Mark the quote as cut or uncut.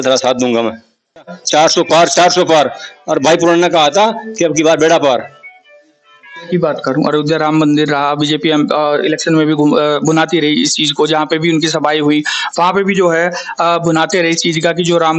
cut